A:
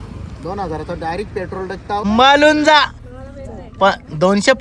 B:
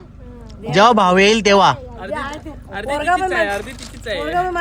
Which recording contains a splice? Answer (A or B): A